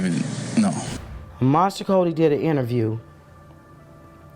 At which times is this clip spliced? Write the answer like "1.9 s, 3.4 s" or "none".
1.0 s